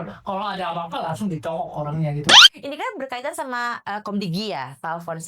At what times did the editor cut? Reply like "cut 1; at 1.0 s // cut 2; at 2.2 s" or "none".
cut 1; at 2.4 s